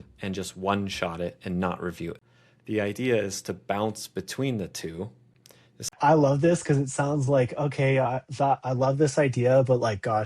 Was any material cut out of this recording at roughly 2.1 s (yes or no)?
yes